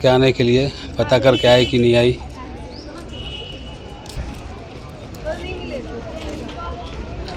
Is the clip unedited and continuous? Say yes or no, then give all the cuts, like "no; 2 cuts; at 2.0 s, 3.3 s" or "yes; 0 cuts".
yes; 0 cuts